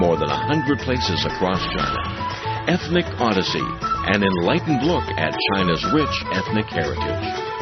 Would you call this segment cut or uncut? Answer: cut